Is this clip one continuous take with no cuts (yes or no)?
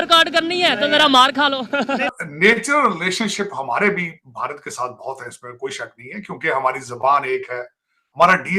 no